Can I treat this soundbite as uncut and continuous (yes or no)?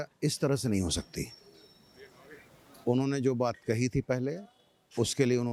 yes